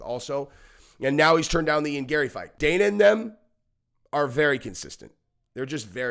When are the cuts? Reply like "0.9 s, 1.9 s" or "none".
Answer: 2.4 s

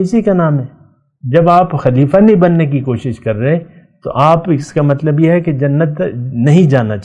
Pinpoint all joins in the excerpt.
none

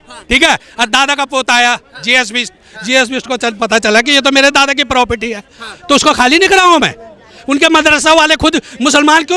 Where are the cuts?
none

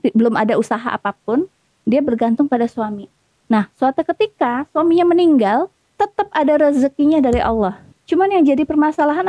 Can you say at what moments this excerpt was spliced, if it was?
5.9 s, 7.9 s

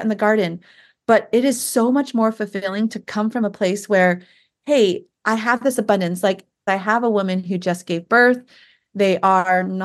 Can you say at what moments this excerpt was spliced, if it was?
6.6 s

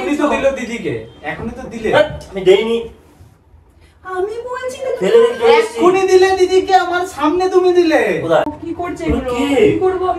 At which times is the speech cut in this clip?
8.6 s

